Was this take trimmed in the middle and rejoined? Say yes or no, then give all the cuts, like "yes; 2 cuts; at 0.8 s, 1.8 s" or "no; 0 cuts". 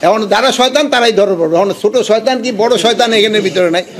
no; 0 cuts